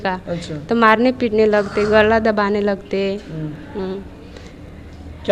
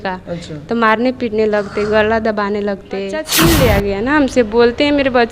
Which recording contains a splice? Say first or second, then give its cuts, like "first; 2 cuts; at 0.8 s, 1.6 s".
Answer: second; 1 cut; at 3.3 s